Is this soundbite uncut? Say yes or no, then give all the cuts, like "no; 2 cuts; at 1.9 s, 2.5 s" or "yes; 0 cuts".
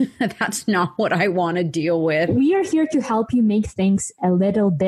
no; 1 cut; at 2.3 s